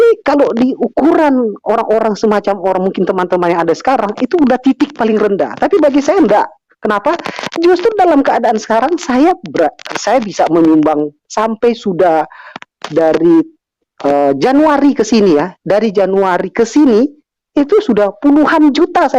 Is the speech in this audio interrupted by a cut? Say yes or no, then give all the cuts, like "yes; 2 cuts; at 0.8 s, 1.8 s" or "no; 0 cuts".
no; 0 cuts